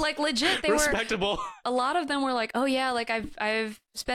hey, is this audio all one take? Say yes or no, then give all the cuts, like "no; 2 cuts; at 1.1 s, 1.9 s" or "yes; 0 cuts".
no; 1 cut; at 1.6 s